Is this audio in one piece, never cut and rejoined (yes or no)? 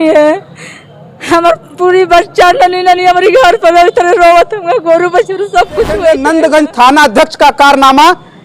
no